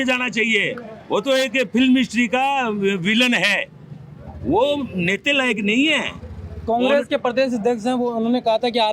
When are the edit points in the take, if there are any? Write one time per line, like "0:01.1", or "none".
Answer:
none